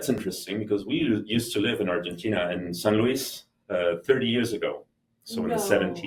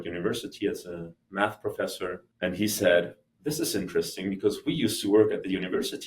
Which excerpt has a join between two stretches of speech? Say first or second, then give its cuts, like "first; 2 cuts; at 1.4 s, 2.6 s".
second; 1 cut; at 2.3 s